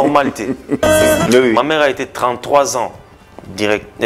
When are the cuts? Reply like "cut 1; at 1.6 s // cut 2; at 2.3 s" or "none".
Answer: cut 1; at 1.0 s